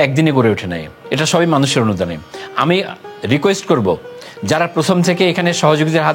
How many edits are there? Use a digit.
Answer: 1